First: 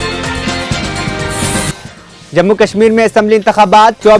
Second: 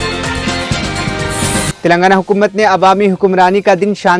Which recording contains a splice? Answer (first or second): first